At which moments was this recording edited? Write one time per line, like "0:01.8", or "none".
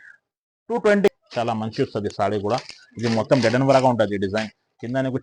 0:01.1